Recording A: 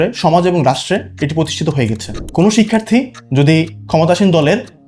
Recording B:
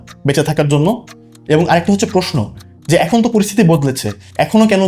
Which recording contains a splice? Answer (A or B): A